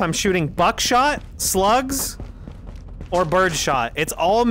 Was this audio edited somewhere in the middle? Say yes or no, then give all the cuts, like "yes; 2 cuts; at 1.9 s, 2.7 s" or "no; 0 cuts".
no; 0 cuts